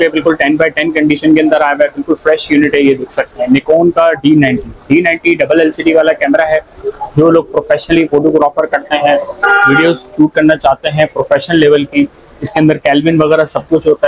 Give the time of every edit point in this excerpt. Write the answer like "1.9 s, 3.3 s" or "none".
none